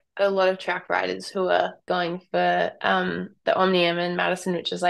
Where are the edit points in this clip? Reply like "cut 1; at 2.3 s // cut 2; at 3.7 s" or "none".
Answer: cut 1; at 1.8 s